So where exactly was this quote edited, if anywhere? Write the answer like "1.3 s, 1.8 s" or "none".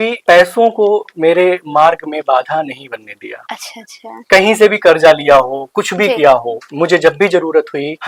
none